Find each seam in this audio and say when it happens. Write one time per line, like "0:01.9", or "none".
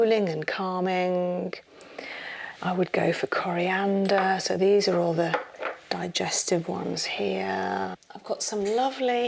0:08.1